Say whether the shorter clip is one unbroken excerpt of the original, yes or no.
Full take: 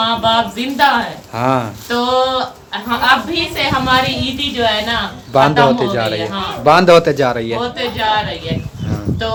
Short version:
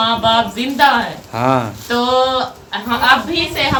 yes